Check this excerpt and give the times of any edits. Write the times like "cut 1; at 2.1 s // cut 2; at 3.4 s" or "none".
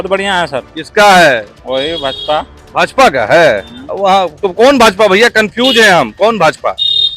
cut 1; at 1.5 s

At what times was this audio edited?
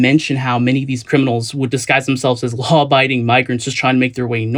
none

